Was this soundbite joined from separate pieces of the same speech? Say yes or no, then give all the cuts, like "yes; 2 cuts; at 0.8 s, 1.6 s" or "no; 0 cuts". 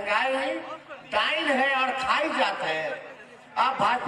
no; 0 cuts